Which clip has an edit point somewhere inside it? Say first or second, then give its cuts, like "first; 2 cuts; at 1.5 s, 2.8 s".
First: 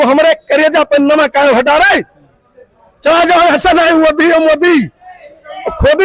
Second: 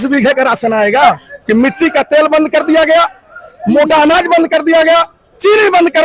second; 1 cut; at 1.0 s